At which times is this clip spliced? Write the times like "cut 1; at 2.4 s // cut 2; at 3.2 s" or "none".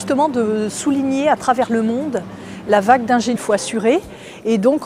none